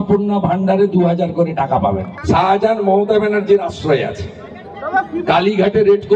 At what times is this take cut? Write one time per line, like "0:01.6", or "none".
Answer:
0:02.1